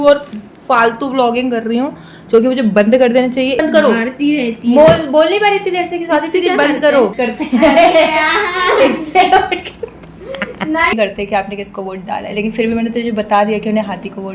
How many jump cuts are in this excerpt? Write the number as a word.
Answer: three